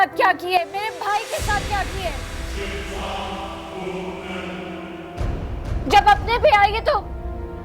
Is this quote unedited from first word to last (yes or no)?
yes